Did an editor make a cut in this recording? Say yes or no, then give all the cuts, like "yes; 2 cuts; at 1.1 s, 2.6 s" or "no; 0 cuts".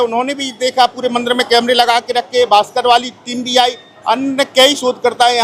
no; 0 cuts